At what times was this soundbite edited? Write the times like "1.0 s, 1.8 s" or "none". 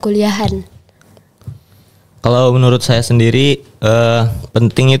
none